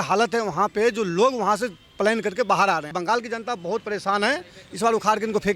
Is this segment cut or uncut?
cut